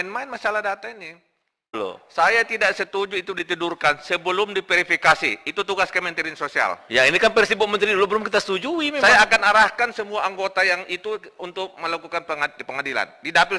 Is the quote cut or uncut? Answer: cut